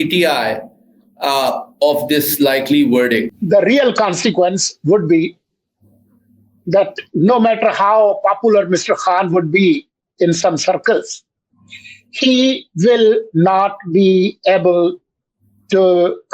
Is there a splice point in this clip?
yes; 1 cut; at 3.3 s

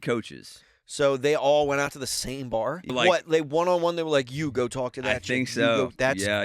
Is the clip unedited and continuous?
no; 1 cut; at 2.9 s

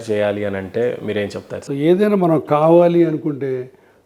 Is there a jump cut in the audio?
yes; 1 cut; at 1.5 s

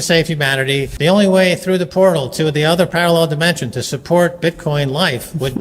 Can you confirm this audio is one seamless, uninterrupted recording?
no; 1 cut; at 0.9 s

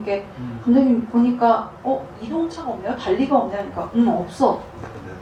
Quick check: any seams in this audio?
no; 0 cuts

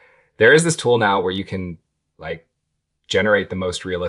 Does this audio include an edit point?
no; 0 cuts

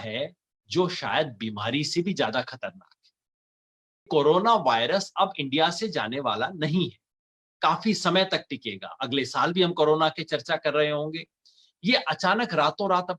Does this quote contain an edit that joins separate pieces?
yes; 1 cut; at 4.1 s

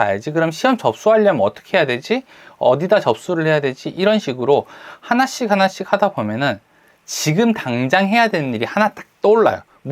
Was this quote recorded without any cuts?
yes; 0 cuts

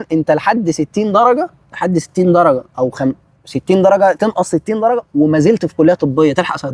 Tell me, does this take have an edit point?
no; 0 cuts

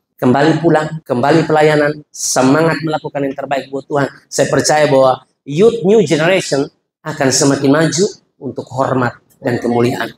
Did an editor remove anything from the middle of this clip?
yes; 1 cut; at 1.0 s

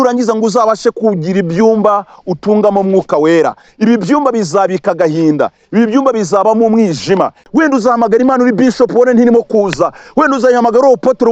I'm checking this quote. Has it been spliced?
yes; 1 cut; at 7.4 s

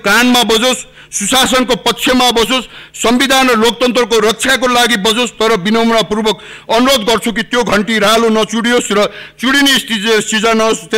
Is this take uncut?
yes; 0 cuts

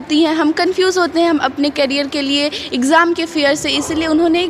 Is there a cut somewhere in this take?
no; 0 cuts

